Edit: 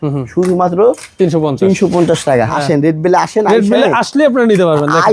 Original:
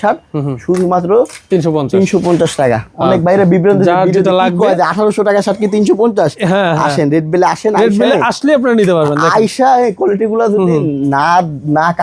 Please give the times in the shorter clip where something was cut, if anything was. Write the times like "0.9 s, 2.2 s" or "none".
2.5 s